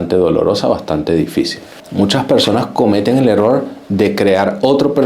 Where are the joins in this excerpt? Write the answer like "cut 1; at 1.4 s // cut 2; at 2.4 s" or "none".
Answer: cut 1; at 1.8 s